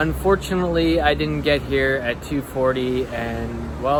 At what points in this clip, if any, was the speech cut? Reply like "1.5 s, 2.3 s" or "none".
none